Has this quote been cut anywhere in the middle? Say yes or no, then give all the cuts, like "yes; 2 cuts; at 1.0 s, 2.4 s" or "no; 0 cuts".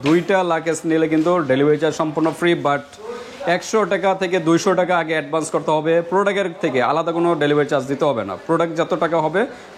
no; 0 cuts